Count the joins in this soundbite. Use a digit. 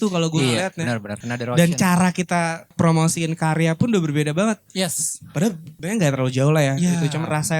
3